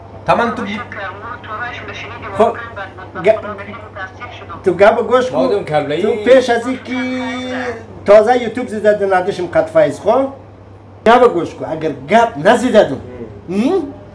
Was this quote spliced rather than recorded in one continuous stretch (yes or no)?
yes